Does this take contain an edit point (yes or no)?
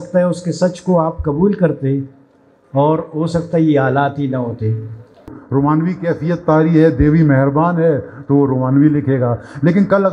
yes